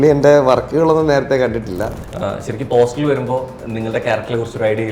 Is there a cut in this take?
yes; 1 cut; at 2.0 s

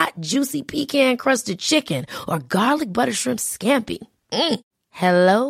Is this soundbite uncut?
yes; 0 cuts

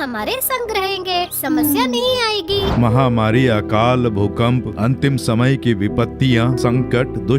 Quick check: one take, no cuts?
no; 1 cut; at 2.7 s

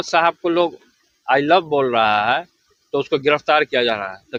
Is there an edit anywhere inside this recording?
no; 0 cuts

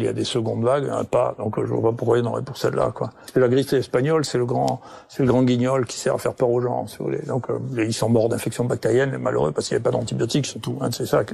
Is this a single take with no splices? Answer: no; 1 cut; at 3.2 s

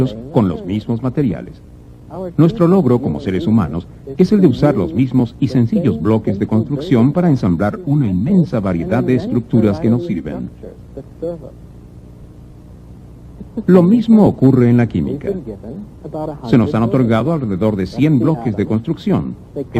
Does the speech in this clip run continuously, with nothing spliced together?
no; 1 cut; at 15.2 s

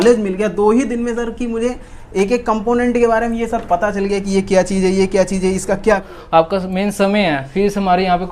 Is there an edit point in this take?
yes; 1 cut; at 6.1 s

